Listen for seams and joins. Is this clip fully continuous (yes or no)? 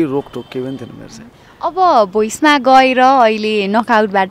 yes